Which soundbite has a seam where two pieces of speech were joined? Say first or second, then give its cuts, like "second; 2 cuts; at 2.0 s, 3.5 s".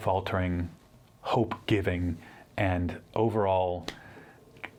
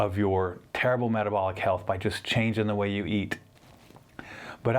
second; 1 cut; at 3.4 s